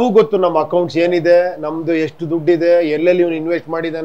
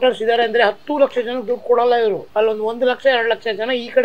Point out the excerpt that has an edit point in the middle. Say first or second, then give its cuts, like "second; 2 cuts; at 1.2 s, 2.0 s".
second; 1 cut; at 2.2 s